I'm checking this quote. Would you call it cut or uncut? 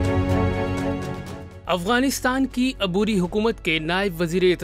uncut